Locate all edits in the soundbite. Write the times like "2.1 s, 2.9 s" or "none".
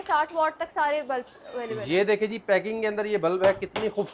none